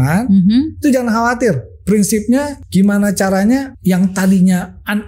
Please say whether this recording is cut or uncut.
cut